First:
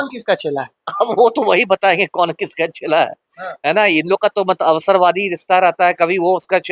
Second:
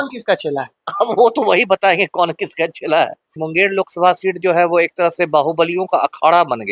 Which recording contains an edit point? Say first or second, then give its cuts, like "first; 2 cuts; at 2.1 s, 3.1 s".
second; 1 cut; at 3.4 s